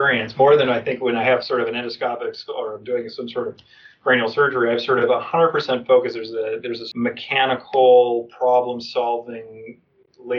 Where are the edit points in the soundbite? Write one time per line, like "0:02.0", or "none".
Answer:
0:06.8